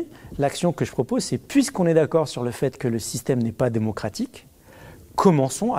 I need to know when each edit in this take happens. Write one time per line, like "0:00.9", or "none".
none

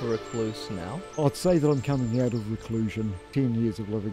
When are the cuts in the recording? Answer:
0:01.2
0:03.2

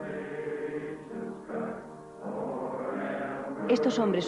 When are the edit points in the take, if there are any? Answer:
none

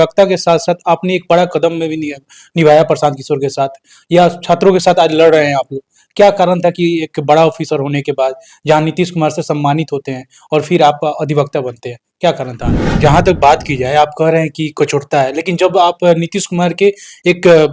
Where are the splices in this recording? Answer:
0:13.0

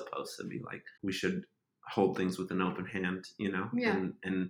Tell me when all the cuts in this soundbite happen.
0:00.9

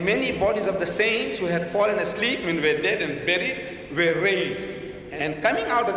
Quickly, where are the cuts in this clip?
0:02.4

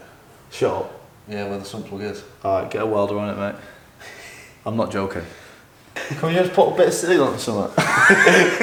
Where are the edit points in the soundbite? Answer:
none

